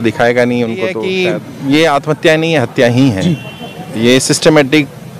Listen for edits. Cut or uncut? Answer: cut